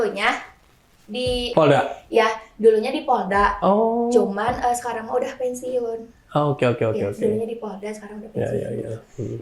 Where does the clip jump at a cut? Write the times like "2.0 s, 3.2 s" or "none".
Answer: 1.5 s